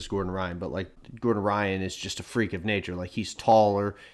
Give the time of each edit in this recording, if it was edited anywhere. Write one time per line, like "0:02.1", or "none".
0:01.0